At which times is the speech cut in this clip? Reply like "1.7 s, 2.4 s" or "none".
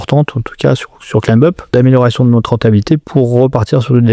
1.7 s, 3.1 s